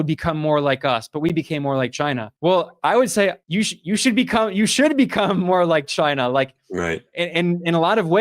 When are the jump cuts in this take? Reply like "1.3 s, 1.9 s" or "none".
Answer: none